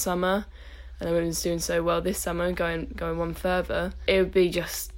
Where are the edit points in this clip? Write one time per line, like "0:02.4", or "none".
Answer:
0:04.0